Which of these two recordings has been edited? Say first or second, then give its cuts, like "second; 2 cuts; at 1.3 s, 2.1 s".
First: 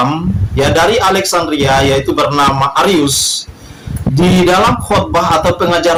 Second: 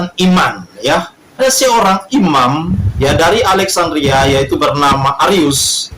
second; 1 cut; at 1.4 s